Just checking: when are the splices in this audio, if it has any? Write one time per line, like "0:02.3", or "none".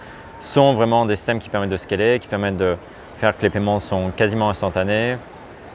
none

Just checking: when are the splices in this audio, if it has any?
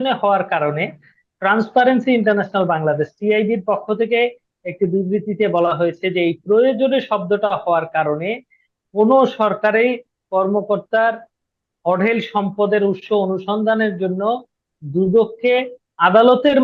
none

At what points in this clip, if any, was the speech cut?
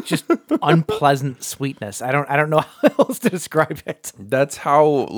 none

